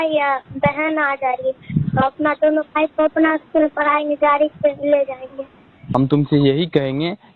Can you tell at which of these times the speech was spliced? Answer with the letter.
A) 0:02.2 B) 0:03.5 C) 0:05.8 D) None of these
C